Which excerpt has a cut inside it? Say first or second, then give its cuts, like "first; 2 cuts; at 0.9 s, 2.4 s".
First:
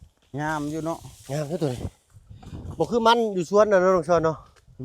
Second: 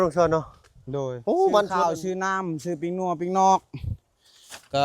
second; 1 cut; at 1.8 s